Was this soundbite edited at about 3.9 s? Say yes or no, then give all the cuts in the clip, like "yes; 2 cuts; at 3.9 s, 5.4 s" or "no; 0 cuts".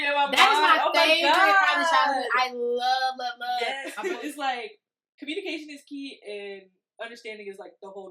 yes; 1 cut; at 3.9 s